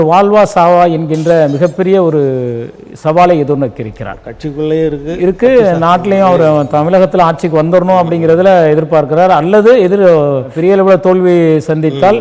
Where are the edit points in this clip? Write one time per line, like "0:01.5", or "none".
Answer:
none